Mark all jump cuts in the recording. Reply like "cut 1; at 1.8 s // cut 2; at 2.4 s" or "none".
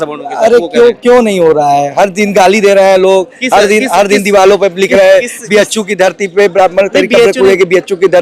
none